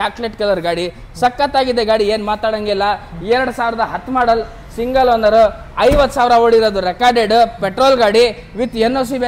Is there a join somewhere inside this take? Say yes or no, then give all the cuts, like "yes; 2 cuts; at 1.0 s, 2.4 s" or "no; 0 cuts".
no; 0 cuts